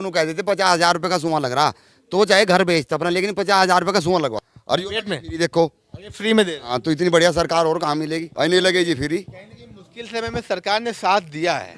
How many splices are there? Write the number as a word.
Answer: zero